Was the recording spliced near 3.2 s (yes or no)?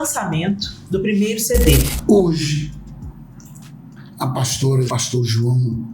no